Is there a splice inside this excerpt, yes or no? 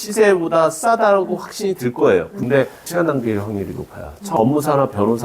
yes